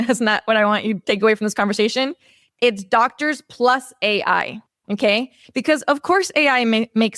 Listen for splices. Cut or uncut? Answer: uncut